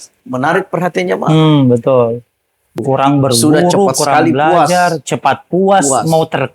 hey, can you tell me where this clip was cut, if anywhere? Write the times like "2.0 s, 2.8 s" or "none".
2.8 s

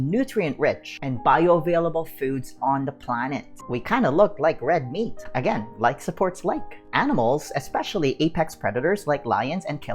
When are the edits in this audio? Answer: 3.6 s, 6.7 s

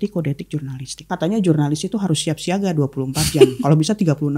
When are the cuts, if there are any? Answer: 1.1 s

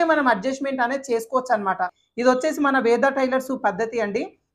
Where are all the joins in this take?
2.0 s

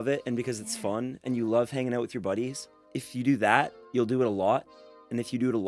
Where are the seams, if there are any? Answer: 3.0 s, 3.8 s

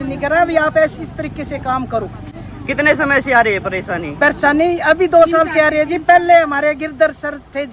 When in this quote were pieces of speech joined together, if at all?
none

